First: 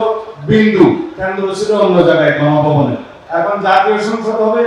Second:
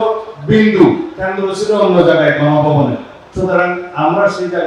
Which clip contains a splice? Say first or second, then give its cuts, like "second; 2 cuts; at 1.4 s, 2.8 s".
first; 1 cut; at 3.1 s